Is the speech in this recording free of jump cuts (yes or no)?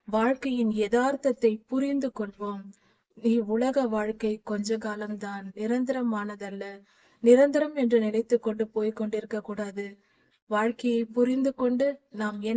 yes